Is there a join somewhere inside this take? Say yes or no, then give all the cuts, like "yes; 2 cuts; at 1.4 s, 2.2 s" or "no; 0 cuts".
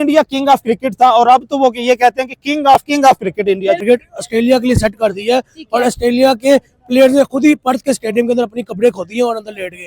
yes; 1 cut; at 3.8 s